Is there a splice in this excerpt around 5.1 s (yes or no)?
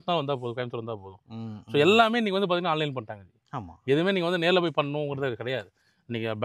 no